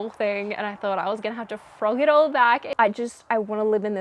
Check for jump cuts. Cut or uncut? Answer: cut